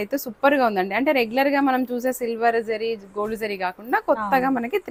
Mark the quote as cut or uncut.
uncut